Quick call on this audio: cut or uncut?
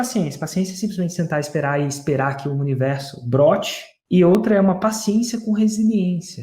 cut